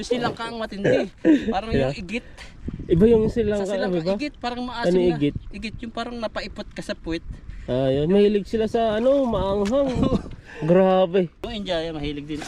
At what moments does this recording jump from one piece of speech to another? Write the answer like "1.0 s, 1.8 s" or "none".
11.5 s